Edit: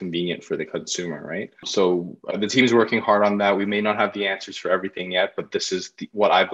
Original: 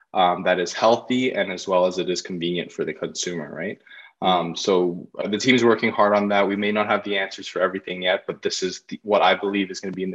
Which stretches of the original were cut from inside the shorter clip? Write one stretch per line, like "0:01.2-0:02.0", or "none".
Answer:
0:03.9-0:04.6